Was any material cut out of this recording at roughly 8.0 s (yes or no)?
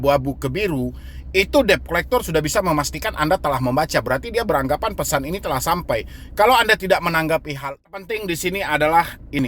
yes